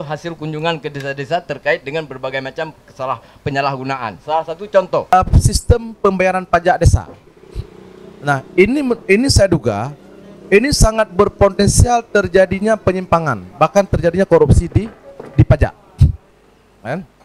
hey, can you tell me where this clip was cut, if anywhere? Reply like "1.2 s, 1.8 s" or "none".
5.1 s